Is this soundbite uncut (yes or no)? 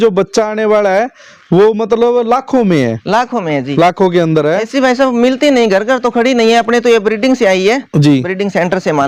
yes